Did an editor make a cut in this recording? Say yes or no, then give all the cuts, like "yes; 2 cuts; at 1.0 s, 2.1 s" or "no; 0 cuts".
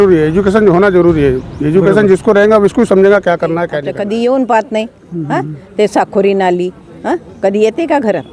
yes; 1 cut; at 3.8 s